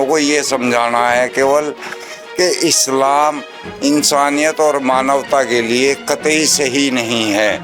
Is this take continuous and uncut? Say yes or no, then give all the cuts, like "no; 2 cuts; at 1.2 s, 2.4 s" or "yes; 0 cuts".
yes; 0 cuts